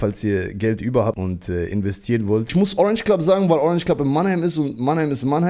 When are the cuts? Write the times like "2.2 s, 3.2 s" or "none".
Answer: 1.2 s, 2.5 s